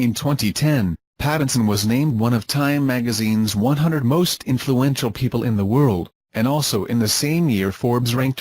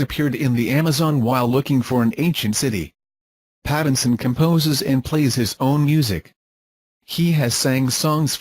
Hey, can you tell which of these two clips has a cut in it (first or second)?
first